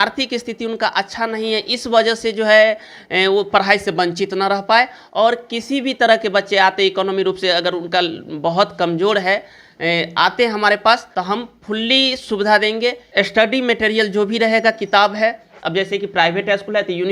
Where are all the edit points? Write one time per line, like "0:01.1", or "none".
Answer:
0:11.1
0:13.0